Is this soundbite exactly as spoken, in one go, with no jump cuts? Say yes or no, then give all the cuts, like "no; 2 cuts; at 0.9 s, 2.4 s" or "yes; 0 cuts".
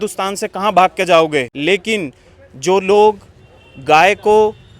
no; 1 cut; at 1.5 s